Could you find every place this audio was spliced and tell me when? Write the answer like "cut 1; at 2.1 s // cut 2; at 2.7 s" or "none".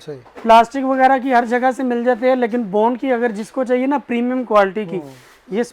none